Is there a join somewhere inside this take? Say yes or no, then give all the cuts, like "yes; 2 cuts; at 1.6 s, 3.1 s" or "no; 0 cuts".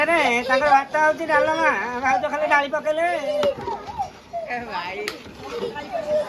no; 0 cuts